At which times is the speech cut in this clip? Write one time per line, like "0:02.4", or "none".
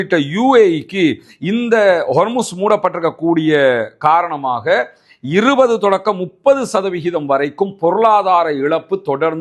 none

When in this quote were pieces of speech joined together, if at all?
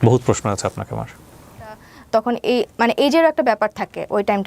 0:01.9

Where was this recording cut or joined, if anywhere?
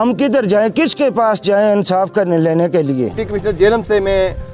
0:03.2

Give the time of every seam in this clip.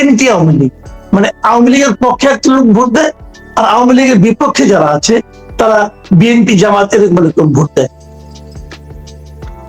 none

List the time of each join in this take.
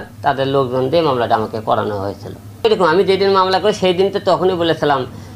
0:02.6

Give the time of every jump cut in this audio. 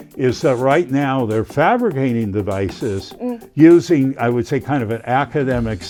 none

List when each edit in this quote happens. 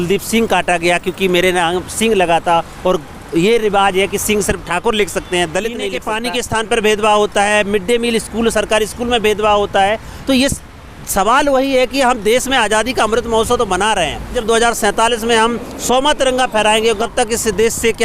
0:06.1
0:14.4
0:17.0

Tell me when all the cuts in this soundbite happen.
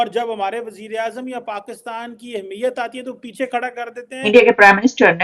0:04.2

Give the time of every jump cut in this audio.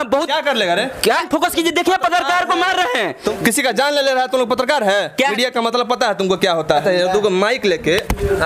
0:01.3
0:03.3
0:05.4
0:06.8

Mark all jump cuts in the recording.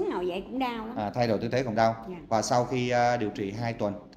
none

